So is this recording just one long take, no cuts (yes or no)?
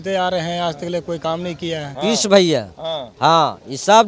no